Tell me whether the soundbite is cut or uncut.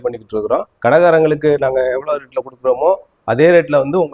uncut